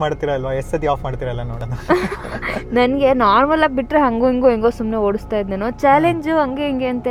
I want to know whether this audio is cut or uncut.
uncut